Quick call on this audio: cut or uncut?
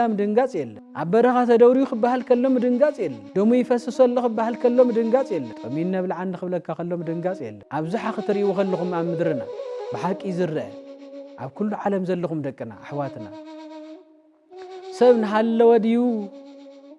cut